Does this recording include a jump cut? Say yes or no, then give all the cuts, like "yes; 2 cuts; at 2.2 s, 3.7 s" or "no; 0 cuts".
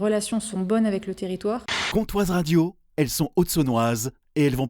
yes; 1 cut; at 1.8 s